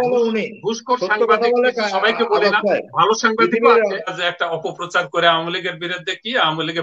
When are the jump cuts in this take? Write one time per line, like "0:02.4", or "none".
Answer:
0:04.2

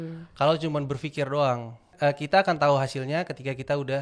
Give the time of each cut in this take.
0:01.9

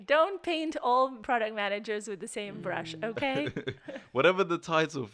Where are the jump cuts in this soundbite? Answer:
0:01.2

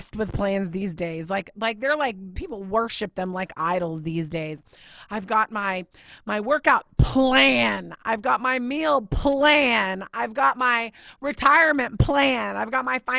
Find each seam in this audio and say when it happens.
none

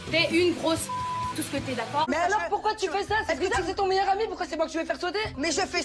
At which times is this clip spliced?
0:02.1

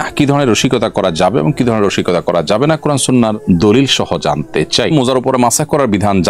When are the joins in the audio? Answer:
0:04.9

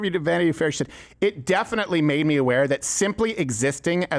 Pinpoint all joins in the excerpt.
none

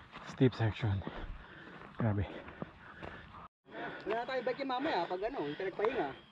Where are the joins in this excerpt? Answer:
0:03.4

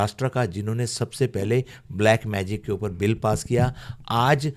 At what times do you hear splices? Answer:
none

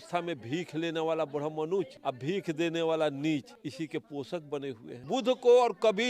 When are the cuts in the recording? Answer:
0:01.9
0:03.5
0:05.1

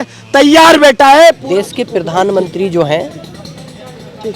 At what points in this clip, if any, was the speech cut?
0:01.4

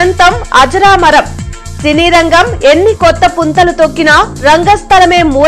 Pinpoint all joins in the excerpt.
none

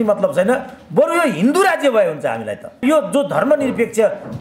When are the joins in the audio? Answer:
0:02.8

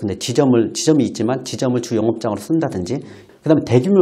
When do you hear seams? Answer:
0:03.1

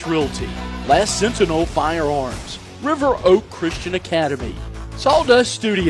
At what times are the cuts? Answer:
none

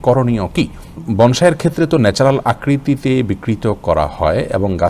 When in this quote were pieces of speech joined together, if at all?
0:01.1

